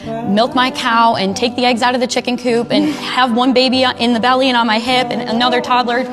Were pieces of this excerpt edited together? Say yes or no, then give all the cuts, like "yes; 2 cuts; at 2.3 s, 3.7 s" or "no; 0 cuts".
no; 0 cuts